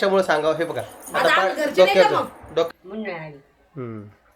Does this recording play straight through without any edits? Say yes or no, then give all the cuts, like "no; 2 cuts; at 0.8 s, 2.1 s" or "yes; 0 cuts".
no; 1 cut; at 2.7 s